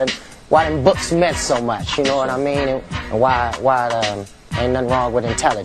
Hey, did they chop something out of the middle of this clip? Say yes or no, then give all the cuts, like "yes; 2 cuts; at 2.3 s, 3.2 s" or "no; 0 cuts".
no; 0 cuts